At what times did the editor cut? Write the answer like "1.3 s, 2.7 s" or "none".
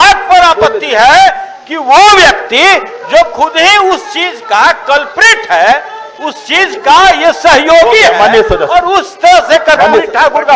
none